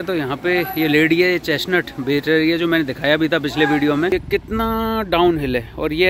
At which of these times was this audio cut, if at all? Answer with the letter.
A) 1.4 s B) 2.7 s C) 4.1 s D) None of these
C